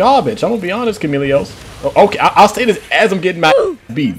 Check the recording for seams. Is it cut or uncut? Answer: uncut